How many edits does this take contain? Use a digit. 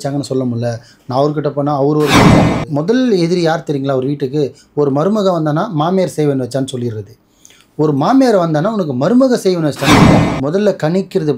2